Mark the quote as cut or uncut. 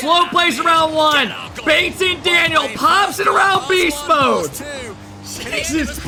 uncut